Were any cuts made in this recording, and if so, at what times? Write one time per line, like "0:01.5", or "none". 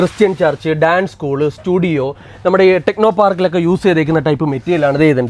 none